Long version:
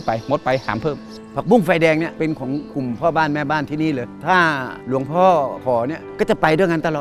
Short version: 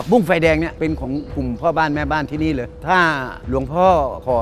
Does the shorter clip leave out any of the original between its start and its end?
no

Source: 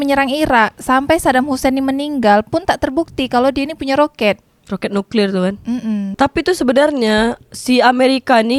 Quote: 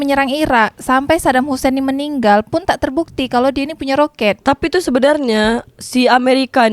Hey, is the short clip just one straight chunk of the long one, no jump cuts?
no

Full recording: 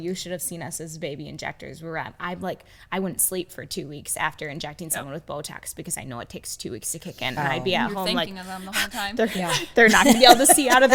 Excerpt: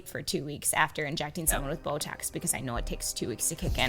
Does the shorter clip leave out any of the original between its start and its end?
no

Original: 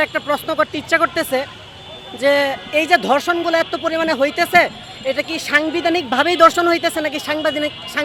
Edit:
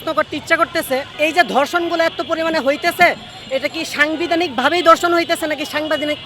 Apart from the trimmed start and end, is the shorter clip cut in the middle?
yes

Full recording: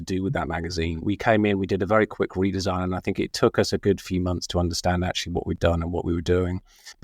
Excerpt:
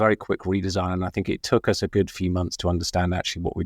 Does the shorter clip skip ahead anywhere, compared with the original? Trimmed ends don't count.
no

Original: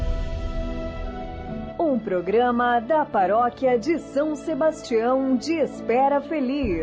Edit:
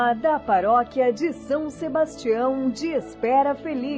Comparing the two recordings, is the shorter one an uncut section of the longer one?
yes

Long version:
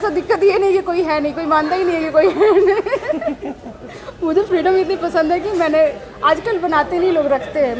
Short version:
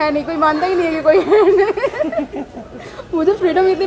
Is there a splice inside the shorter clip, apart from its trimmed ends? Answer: no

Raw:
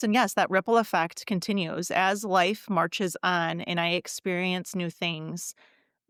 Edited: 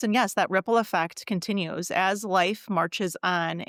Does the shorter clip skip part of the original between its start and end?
no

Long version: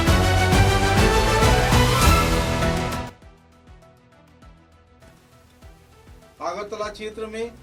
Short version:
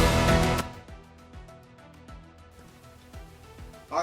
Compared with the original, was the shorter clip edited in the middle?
yes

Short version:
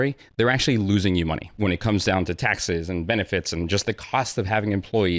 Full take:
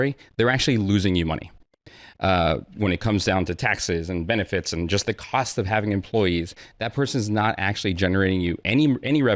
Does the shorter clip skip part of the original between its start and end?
yes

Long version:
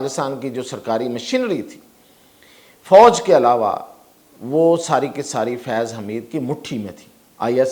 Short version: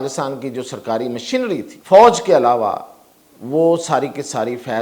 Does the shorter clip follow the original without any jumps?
no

